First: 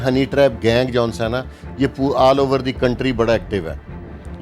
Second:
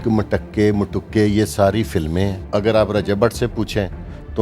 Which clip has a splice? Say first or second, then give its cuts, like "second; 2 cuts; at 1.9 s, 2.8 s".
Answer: second; 1 cut; at 2.4 s